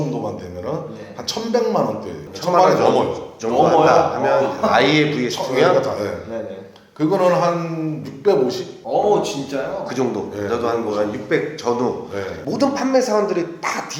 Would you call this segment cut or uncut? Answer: uncut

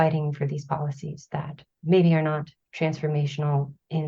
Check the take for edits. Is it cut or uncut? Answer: cut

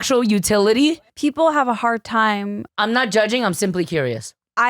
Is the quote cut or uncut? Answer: cut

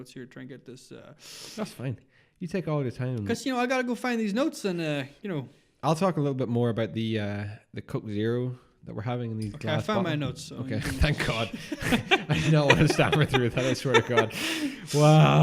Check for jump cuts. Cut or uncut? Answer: uncut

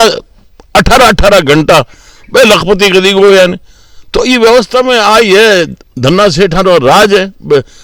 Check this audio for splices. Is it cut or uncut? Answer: uncut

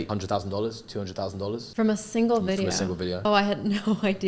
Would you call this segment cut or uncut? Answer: uncut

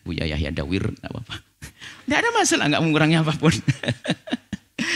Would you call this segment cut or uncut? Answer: uncut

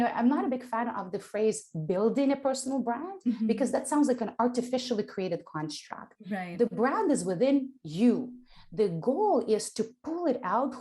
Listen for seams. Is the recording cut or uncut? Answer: uncut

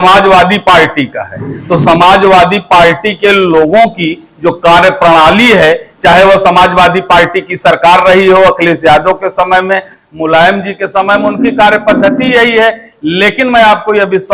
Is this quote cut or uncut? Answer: uncut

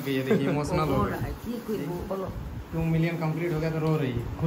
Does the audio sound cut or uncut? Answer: uncut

